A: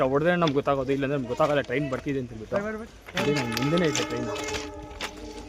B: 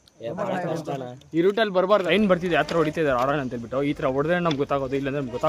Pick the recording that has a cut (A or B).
B